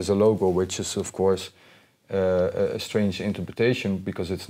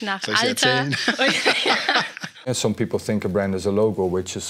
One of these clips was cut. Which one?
second; 1 cut; at 2.4 s

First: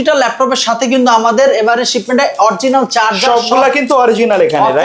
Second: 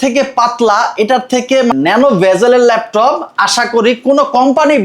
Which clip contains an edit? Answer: second; 1 cut; at 1.7 s

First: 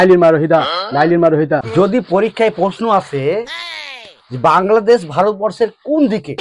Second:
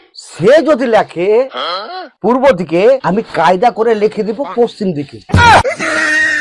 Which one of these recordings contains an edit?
first; 1 cut; at 1.7 s

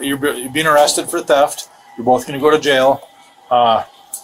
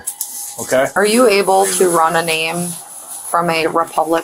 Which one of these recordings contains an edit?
second; 1 cut; at 0.9 s

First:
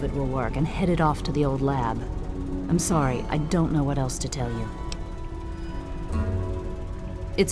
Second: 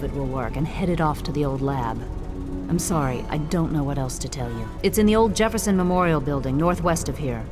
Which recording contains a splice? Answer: second; 1 cut; at 4.7 s

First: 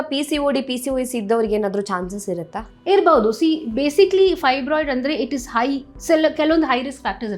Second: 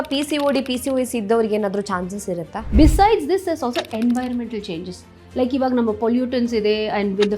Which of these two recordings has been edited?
second; 1 cut; at 2.7 s

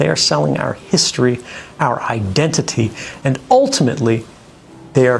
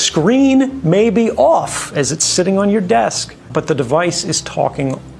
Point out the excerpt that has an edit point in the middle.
second; 1 cut; at 3.5 s

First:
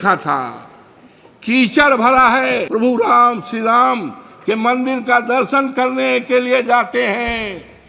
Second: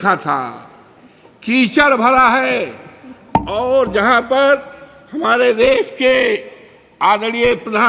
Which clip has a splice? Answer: first; 1 cut; at 2.7 s

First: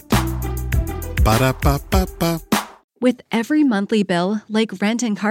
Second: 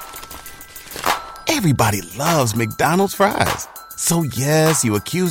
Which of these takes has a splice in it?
first; 1 cut; at 2.8 s

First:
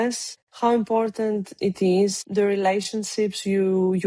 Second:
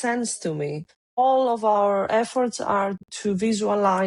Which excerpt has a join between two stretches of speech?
second; 1 cut; at 1.0 s

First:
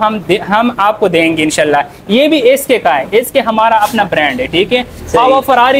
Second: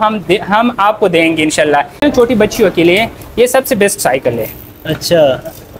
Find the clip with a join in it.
second; 1 cut; at 2.0 s

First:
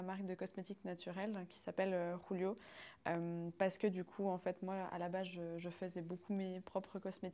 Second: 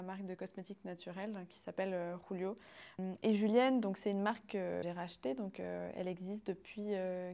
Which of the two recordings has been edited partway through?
second; 2 cuts; at 3.0 s, 4.8 s

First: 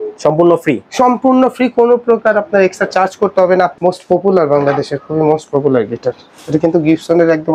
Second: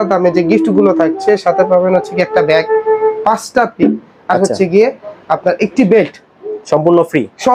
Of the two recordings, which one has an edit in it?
first; 1 cut; at 3.7 s

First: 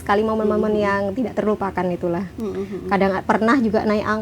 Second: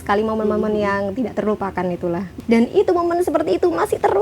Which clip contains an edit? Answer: second; 1 cut; at 2.3 s

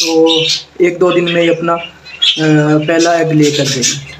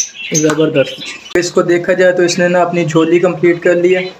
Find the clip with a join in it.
second; 1 cut; at 1.3 s

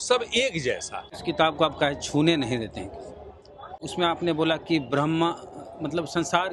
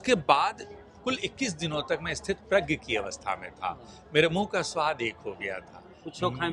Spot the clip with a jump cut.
first; 2 cuts; at 1.0 s, 3.9 s

